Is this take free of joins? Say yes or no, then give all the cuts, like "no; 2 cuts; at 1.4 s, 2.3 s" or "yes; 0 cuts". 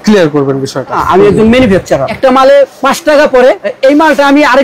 no; 4 cuts; at 1.0 s, 2.1 s, 2.8 s, 3.7 s